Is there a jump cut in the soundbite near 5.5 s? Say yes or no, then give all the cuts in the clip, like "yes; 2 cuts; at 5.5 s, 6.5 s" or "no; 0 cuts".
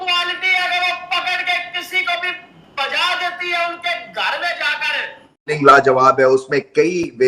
yes; 1 cut; at 5.5 s